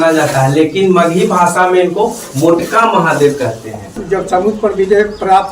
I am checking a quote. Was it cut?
yes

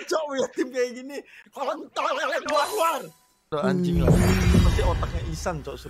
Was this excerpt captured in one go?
no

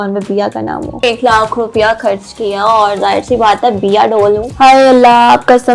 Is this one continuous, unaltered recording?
no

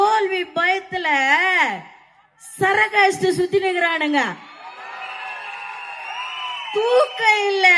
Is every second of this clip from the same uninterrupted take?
yes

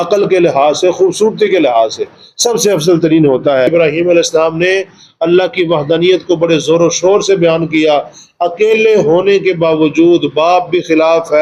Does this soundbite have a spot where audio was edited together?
yes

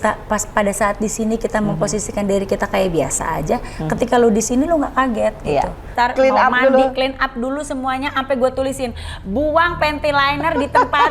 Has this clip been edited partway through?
yes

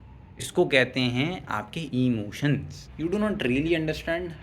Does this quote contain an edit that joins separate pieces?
yes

